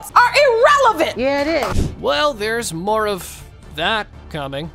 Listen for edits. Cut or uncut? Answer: uncut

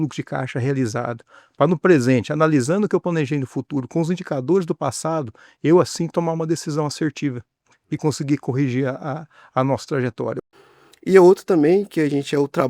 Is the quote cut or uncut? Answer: cut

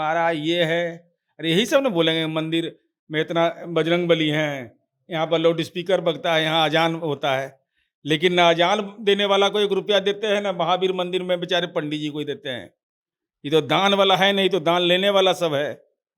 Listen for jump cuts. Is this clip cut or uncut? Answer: uncut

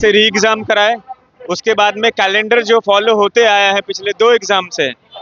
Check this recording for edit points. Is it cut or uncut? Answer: uncut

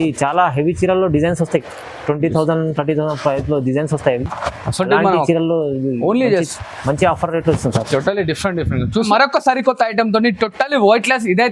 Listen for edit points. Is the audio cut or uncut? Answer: cut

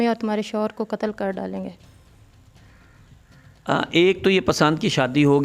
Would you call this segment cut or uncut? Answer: uncut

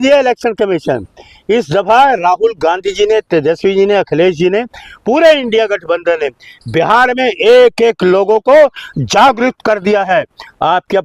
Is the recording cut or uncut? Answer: uncut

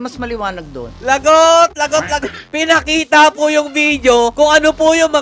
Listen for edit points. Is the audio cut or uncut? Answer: cut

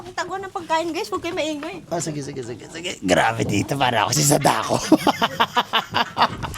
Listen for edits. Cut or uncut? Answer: uncut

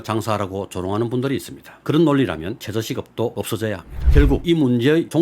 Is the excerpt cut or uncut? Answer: cut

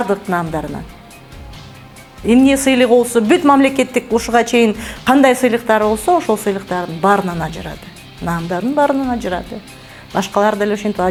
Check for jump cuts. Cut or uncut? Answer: uncut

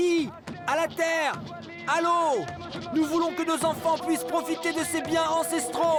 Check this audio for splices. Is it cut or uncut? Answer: uncut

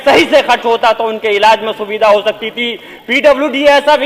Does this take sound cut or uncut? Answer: uncut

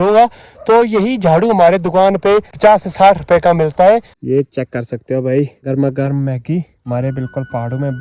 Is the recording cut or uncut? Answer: cut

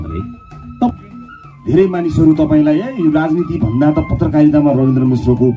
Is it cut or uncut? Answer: cut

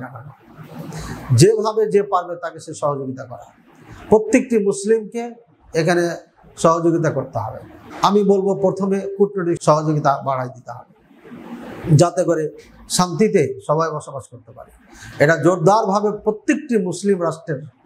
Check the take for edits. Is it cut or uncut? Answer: uncut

